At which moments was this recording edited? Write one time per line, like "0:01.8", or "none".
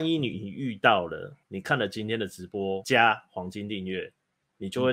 0:02.8